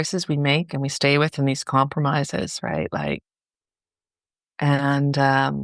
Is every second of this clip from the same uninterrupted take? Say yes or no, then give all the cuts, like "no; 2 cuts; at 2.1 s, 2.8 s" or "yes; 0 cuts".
yes; 0 cuts